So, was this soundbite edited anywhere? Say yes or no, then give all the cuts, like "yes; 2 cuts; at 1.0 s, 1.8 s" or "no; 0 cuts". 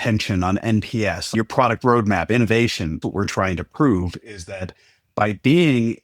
yes; 2 cuts; at 1.3 s, 3.0 s